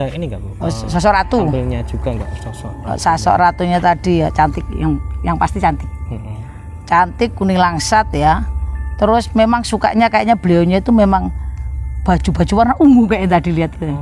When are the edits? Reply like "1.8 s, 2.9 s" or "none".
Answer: none